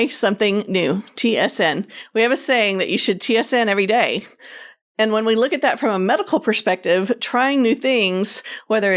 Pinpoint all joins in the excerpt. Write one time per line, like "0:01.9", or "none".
none